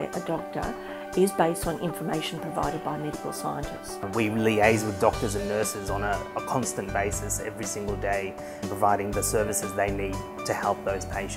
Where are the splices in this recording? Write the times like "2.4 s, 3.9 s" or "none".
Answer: 8.1 s